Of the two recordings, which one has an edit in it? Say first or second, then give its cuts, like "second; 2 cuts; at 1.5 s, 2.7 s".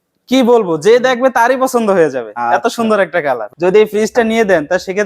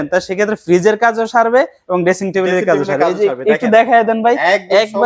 first; 1 cut; at 3.5 s